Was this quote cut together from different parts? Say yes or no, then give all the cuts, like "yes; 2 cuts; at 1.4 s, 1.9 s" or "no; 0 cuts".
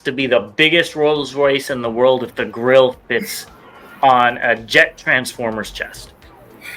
no; 0 cuts